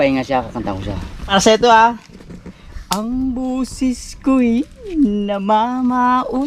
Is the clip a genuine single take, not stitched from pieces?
no; 1 cut; at 1.3 s

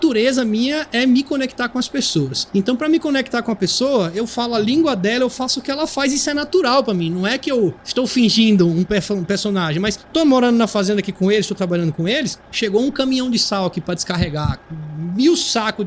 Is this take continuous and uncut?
yes; 0 cuts

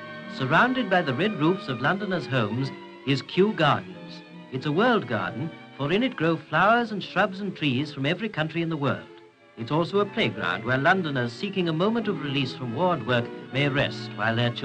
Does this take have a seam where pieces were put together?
yes; 1 cut; at 0.9 s

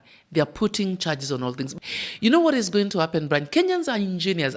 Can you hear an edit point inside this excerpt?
yes; 1 cut; at 1.7 s

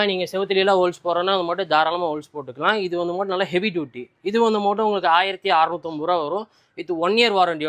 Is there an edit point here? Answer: no; 0 cuts

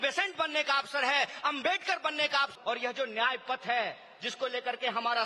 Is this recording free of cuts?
no; 1 cut; at 2.5 s

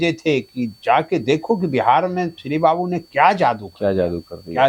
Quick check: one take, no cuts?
yes; 0 cuts

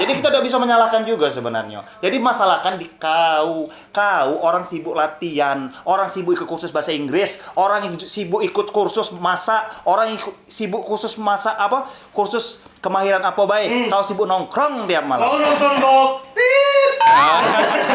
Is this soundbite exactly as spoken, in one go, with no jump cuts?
yes; 0 cuts

